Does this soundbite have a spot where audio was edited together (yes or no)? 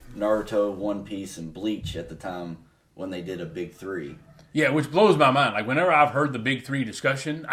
no